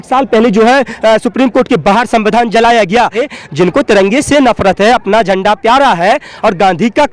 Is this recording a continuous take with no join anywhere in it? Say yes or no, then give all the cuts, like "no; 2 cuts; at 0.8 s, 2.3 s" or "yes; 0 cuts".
no; 1 cut; at 3.2 s